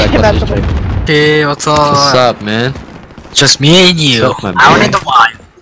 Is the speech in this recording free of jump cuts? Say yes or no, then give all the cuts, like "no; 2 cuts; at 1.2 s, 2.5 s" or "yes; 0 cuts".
no; 1 cut; at 1.1 s